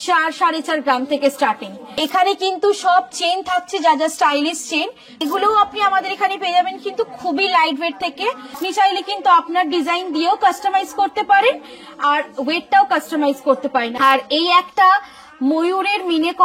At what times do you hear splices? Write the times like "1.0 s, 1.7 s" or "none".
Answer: 2.0 s, 5.2 s, 8.6 s, 13.9 s